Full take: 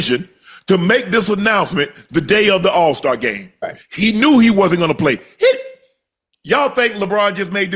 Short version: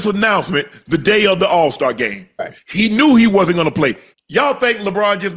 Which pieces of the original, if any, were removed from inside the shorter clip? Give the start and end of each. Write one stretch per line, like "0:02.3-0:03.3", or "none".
0:05.3-0:06.2